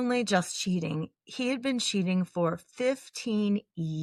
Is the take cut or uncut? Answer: uncut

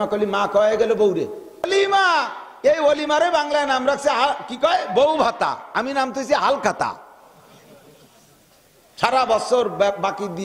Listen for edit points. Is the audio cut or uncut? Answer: cut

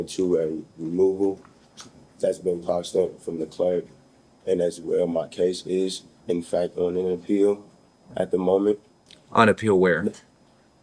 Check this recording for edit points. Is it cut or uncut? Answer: uncut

